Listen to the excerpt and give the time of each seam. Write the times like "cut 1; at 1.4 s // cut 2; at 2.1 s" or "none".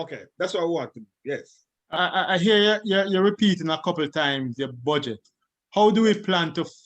cut 1; at 1.9 s